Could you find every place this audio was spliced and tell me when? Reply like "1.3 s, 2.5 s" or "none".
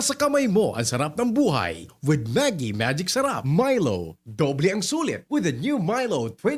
3.4 s